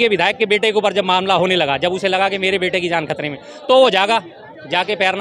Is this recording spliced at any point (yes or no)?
no